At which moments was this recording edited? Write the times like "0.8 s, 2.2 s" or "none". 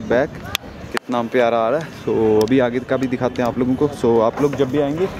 none